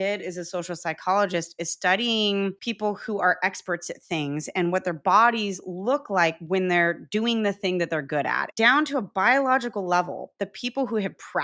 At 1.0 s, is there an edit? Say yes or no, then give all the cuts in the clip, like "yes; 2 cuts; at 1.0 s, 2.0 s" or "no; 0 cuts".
no; 2 cuts; at 2.6 s, 8.5 s